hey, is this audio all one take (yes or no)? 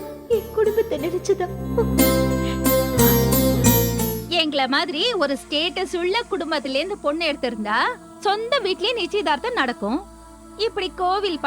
no